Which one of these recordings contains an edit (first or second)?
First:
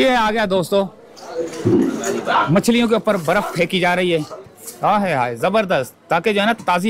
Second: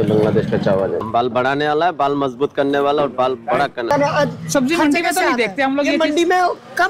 second